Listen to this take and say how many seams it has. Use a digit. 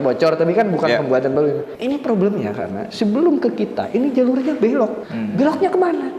2